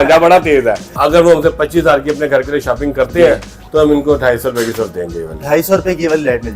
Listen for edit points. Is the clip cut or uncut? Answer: cut